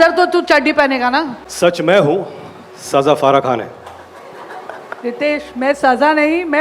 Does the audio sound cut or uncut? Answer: cut